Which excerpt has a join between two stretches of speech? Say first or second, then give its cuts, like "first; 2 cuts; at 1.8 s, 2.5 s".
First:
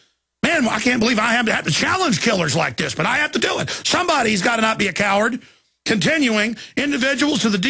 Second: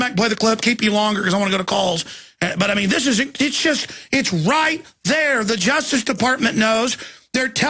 first; 1 cut; at 5.7 s